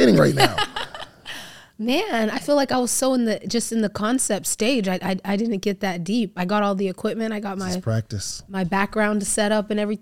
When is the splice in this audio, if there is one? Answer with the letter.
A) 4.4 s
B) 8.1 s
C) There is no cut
C